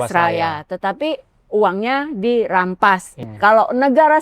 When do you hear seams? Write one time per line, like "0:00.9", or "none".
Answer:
0:03.2